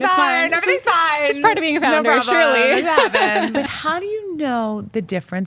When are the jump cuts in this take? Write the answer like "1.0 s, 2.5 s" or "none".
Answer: 3.5 s